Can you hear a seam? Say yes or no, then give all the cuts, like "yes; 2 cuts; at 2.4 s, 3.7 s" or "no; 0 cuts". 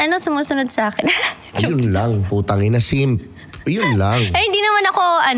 no; 0 cuts